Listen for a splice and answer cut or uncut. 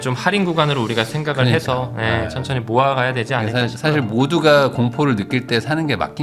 uncut